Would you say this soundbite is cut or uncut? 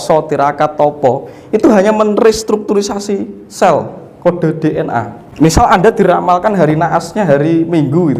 cut